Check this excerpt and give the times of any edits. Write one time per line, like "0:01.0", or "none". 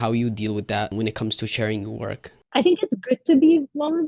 0:00.9
0:02.3